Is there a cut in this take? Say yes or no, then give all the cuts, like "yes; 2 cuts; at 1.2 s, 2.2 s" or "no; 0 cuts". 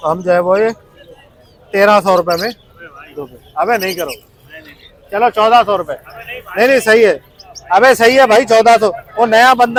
no; 0 cuts